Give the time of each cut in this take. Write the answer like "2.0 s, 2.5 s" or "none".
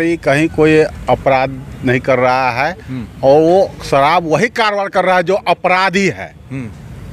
none